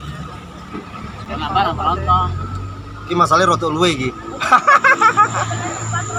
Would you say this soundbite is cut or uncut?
uncut